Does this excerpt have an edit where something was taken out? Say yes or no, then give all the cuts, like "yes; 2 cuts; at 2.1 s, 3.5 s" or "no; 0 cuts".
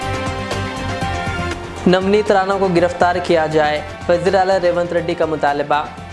yes; 1 cut; at 1.5 s